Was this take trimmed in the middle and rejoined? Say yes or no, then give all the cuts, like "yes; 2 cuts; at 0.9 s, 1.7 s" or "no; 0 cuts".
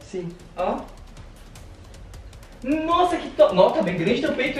no; 0 cuts